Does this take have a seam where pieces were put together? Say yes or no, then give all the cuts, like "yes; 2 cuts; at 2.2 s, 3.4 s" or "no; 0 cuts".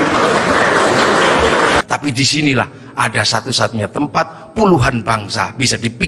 yes; 1 cut; at 1.8 s